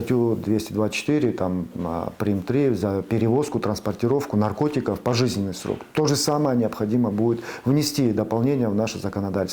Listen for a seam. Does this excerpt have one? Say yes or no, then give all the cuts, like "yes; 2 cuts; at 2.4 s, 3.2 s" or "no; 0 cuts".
no; 0 cuts